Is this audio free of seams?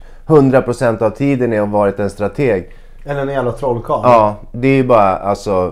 yes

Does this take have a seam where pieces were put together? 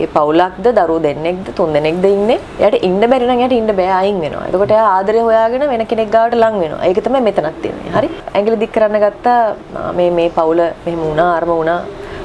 yes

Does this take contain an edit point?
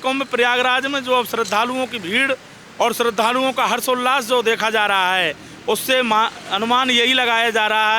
no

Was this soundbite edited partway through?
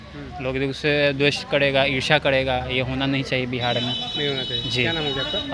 no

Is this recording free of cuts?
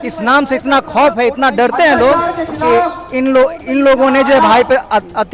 yes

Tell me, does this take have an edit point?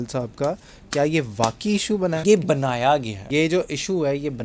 yes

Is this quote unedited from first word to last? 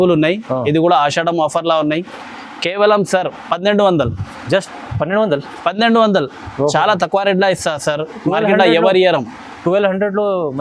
yes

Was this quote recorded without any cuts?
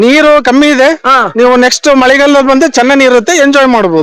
yes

